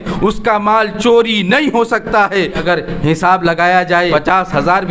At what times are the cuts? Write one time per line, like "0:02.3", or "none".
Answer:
0:02.6
0:04.1